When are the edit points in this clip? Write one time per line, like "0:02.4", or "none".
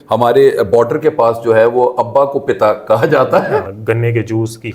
0:03.7